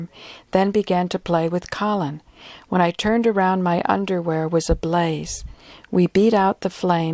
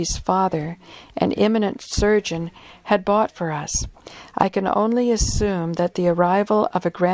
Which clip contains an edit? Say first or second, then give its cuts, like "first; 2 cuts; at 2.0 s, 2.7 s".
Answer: first; 1 cut; at 5.9 s